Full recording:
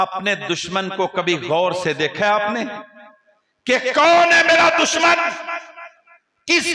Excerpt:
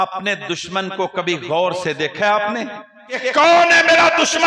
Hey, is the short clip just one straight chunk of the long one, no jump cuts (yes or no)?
no